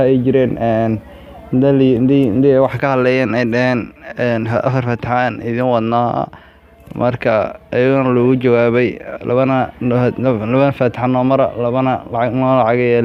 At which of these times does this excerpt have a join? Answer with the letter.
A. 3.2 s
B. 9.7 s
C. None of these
C